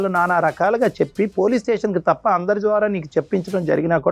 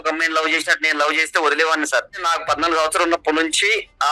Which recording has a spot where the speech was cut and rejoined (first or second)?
second